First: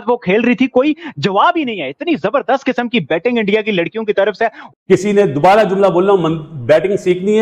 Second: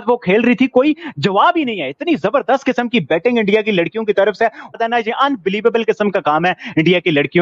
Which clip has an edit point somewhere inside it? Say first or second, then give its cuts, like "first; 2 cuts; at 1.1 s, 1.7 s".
first; 1 cut; at 4.7 s